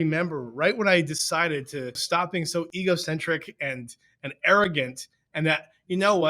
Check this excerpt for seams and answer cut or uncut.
cut